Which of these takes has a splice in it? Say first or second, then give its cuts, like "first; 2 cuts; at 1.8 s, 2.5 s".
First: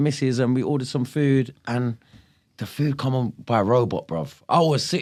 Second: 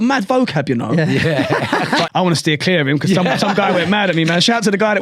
second; 1 cut; at 2.1 s